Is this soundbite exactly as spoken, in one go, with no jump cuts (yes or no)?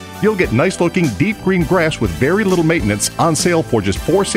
yes